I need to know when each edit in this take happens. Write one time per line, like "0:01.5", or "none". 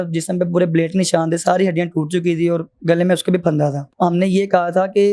0:03.9